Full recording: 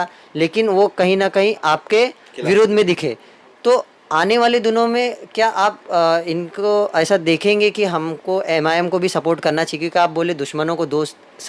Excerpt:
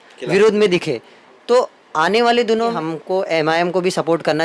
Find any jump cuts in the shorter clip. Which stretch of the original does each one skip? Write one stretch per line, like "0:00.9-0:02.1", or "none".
0:04.9-0:07.9